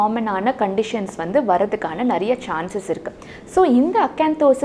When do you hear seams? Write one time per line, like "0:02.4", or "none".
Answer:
none